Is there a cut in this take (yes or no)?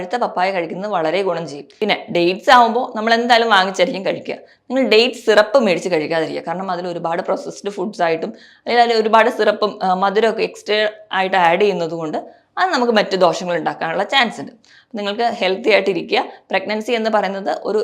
yes